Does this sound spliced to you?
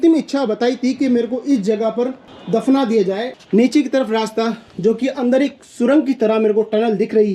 yes; 1 cut; at 3.3 s

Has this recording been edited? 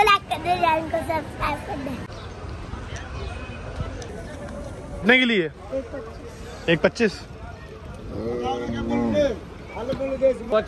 yes; 1 cut; at 2.1 s

